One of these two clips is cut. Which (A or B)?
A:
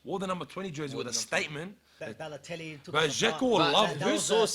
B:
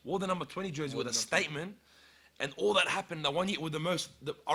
A